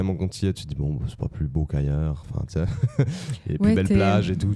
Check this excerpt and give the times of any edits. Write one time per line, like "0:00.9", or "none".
none